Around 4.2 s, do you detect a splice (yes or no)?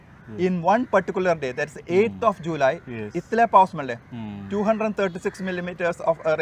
no